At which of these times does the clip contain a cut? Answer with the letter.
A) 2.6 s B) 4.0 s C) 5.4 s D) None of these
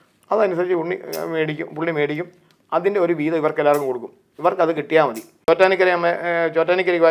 C